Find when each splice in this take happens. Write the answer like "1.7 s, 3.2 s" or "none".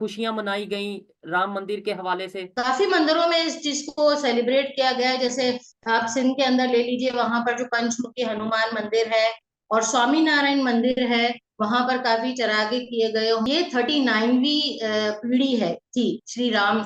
2.5 s, 13.5 s